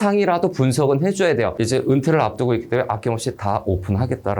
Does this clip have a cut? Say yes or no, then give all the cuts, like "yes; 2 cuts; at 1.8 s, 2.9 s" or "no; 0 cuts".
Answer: yes; 1 cut; at 1.5 s